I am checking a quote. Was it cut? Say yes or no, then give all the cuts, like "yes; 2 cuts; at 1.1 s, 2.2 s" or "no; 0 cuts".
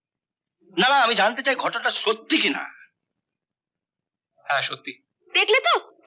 no; 0 cuts